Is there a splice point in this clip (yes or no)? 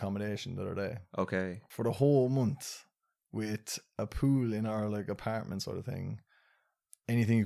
yes